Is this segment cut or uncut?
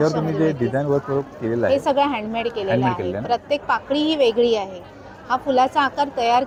uncut